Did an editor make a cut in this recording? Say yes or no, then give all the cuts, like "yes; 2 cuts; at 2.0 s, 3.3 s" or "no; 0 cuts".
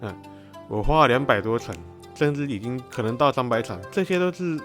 yes; 2 cuts; at 2.9 s, 3.9 s